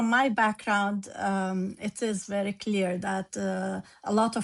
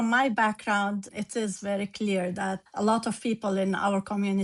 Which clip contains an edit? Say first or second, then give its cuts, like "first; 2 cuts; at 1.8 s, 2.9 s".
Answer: second; 2 cuts; at 1.1 s, 2.6 s